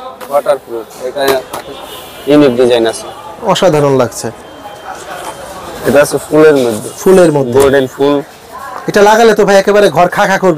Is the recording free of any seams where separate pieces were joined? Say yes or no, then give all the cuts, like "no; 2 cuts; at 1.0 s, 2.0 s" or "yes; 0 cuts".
yes; 0 cuts